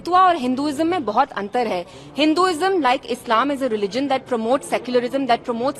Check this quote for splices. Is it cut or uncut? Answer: uncut